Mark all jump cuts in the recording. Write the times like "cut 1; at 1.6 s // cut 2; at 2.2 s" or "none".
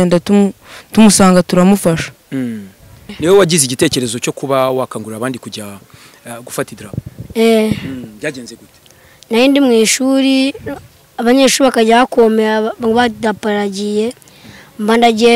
cut 1; at 3.1 s